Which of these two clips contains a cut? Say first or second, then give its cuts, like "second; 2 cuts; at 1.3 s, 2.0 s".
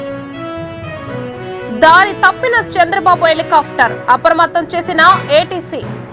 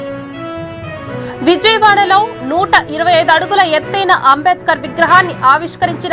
first; 1 cut; at 1.2 s